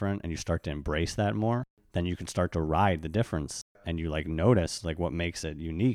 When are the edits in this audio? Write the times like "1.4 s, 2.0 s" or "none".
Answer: 1.8 s